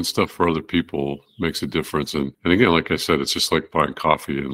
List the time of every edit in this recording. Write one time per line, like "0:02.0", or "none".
0:02.3